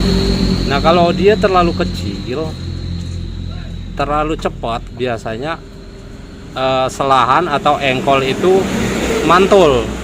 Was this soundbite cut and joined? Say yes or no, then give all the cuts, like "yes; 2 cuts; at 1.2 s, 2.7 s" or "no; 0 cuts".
yes; 1 cut; at 4.9 s